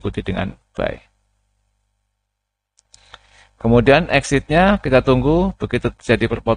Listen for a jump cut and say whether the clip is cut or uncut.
uncut